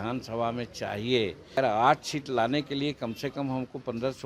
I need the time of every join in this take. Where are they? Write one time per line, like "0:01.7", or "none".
0:01.6